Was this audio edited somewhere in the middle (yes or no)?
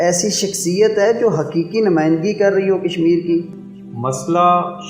yes